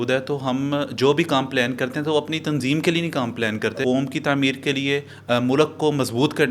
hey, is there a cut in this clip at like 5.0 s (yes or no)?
no